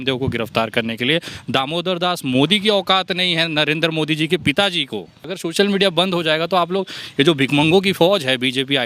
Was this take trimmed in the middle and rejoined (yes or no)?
yes